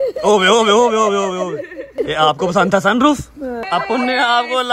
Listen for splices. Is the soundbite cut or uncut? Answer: cut